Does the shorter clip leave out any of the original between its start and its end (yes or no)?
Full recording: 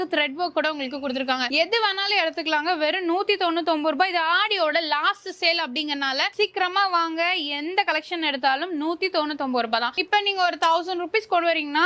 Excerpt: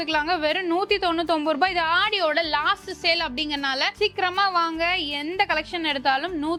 no